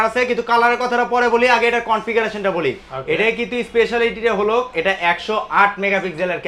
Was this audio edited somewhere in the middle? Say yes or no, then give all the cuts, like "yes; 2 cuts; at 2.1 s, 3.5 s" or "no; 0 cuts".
no; 0 cuts